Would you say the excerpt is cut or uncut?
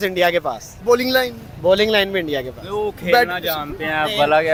uncut